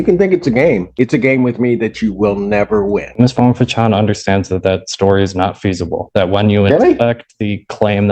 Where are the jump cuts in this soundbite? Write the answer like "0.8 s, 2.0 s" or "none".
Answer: 3.1 s

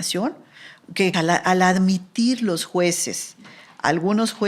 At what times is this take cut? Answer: 1.1 s

